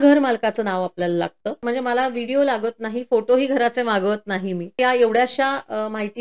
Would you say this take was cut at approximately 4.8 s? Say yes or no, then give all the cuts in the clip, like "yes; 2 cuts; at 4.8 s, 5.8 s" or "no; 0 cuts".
yes; 2 cuts; at 1.6 s, 4.8 s